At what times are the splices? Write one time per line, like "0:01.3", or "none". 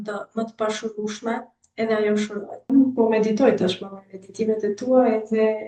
0:02.7

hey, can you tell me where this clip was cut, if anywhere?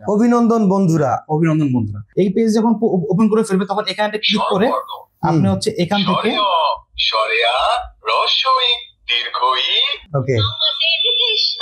0:02.0
0:10.0

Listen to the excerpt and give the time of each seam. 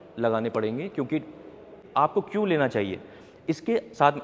0:01.8

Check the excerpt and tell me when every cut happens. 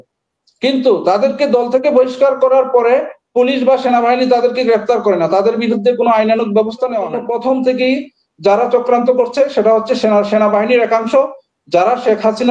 0:07.1

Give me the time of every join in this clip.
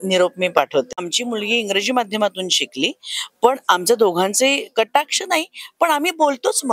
0:00.9

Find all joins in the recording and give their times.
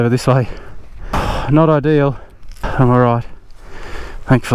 0:01.2
0:02.7

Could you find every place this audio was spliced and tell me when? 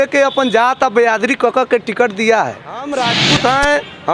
0:02.8

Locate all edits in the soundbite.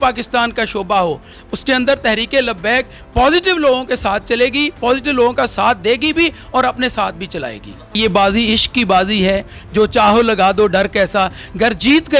0:08.0

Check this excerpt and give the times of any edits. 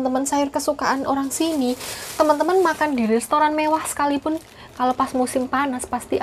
none

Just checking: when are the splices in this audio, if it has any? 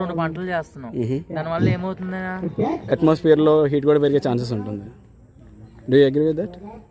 0:02.8

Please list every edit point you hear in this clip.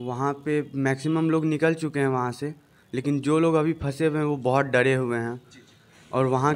none

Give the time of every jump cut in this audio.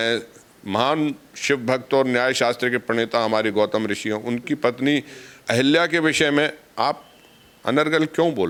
none

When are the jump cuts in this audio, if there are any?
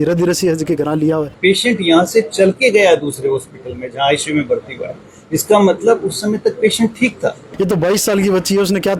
0:01.3
0:07.4

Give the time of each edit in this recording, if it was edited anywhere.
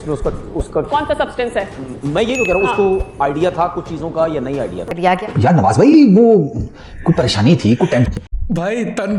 none

